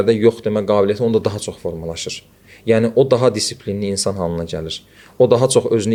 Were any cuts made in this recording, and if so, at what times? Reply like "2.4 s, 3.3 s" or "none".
none